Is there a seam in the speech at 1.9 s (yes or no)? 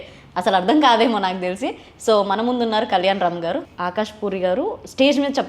no